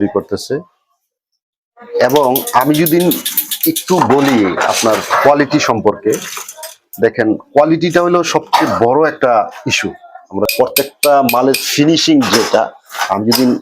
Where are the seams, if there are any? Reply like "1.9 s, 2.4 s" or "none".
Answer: 10.5 s